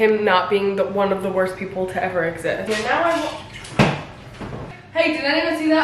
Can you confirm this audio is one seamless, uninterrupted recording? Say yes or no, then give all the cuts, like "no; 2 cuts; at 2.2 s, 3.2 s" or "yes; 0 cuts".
no; 2 cuts; at 2.7 s, 4.8 s